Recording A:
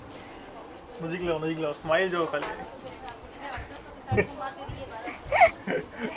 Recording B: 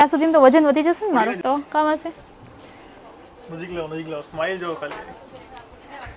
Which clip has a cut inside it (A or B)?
B